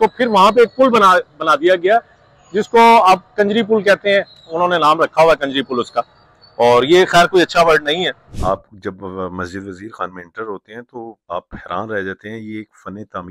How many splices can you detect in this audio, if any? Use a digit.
1